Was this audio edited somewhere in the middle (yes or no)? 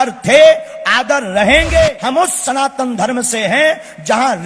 yes